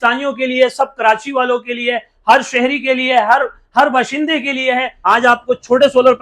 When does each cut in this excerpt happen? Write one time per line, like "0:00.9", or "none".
0:04.9